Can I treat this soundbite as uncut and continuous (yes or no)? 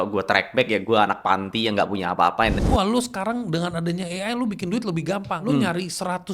no